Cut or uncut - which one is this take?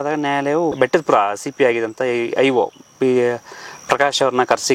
uncut